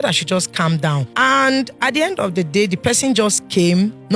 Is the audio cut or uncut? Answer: cut